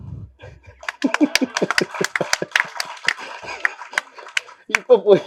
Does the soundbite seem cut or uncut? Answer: uncut